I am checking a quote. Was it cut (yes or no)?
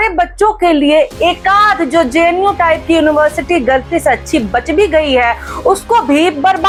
no